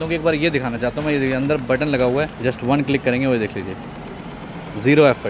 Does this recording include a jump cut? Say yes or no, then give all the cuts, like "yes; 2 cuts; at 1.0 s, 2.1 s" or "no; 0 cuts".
no; 0 cuts